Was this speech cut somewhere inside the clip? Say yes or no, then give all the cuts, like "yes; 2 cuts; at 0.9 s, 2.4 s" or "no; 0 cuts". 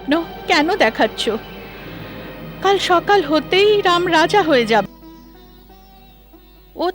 yes; 1 cut; at 4.8 s